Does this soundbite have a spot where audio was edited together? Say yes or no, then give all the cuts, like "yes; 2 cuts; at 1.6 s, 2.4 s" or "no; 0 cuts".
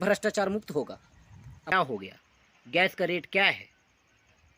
yes; 1 cut; at 1.7 s